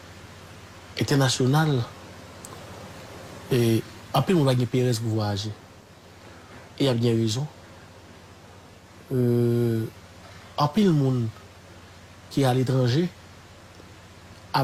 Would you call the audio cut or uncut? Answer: uncut